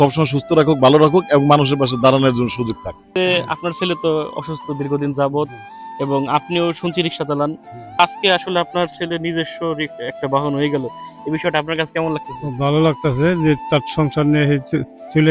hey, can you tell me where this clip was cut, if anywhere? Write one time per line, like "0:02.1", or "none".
0:03.1
0:08.0